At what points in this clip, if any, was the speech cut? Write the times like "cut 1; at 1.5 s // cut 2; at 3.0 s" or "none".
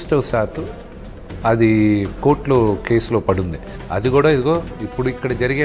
none

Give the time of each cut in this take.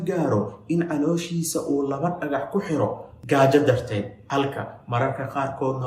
none

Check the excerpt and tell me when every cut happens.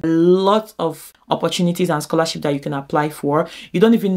cut 1; at 1.1 s

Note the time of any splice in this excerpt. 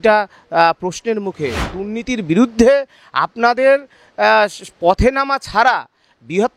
cut 1; at 1.7 s

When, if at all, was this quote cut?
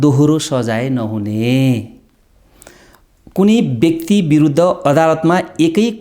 none

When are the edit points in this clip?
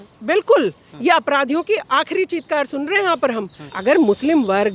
cut 1; at 3.6 s

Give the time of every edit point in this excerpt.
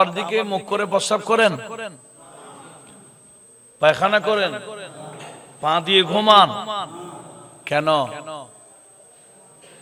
none

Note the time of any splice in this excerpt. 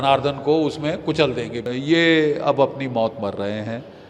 cut 1; at 1.7 s

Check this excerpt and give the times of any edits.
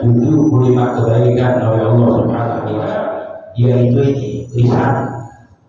cut 1; at 2.8 s

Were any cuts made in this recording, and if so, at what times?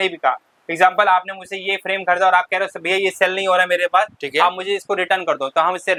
none

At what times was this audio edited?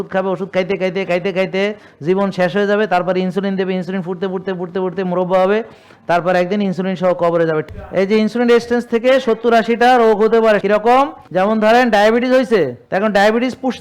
cut 1; at 7.6 s // cut 2; at 10.8 s // cut 3; at 12.8 s

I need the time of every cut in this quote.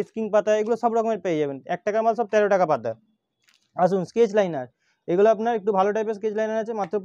none

